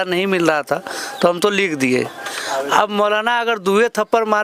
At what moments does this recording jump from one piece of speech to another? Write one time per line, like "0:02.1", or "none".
none